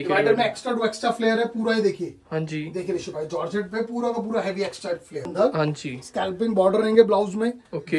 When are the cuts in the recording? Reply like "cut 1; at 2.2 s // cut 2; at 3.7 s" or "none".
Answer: cut 1; at 5.3 s

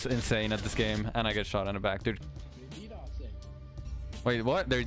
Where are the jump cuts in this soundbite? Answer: cut 1; at 2.2 s

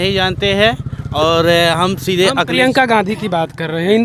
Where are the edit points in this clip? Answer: none

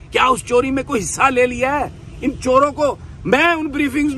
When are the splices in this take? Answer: none

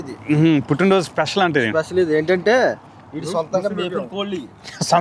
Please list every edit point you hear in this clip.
none

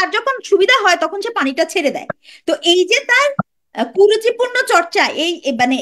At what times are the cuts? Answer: none

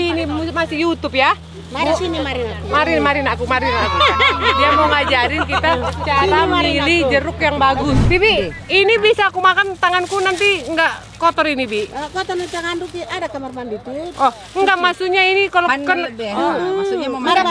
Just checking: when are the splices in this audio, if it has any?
cut 1; at 8.0 s

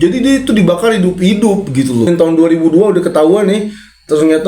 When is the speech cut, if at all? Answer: cut 1; at 2.1 s

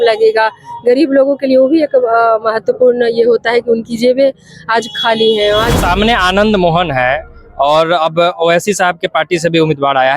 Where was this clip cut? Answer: cut 1; at 5.7 s

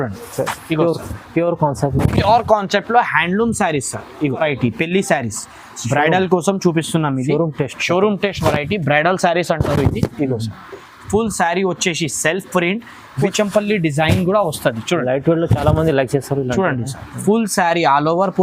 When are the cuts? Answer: cut 1; at 4.4 s // cut 2; at 13.2 s

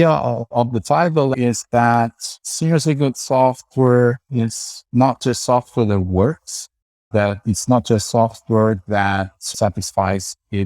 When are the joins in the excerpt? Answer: cut 1; at 1.3 s

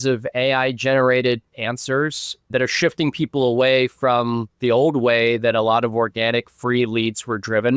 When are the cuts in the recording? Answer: none

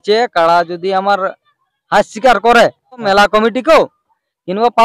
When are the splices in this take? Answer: cut 1; at 3.0 s

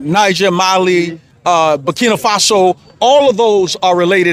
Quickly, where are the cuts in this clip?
none

